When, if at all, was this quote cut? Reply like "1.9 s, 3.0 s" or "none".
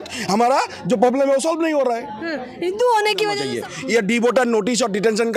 3.4 s